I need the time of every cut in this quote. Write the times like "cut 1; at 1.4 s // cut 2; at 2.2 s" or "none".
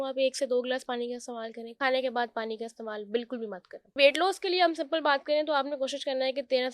cut 1; at 1.8 s // cut 2; at 3.9 s